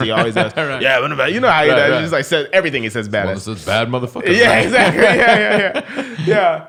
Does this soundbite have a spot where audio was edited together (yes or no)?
no